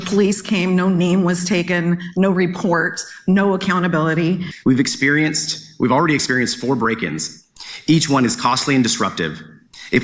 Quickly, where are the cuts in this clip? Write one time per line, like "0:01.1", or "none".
0:04.5